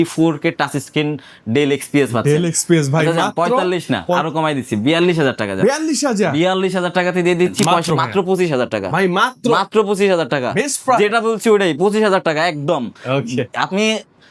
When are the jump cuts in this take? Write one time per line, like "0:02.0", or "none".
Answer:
0:07.7